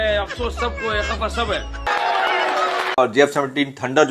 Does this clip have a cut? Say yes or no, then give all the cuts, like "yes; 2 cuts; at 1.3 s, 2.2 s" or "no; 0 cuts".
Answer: yes; 1 cut; at 1.9 s